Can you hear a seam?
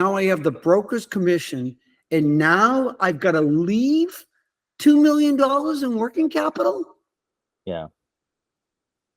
no; 0 cuts

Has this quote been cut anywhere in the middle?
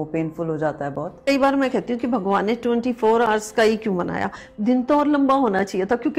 yes; 1 cut; at 1.2 s

